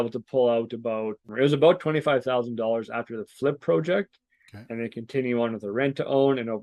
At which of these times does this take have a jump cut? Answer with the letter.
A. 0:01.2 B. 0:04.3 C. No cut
A